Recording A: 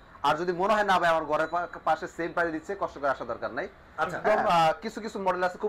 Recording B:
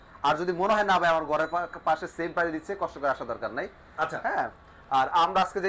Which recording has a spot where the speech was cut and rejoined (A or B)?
A